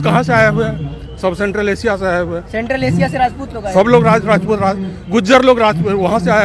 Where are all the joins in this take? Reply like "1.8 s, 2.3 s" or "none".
none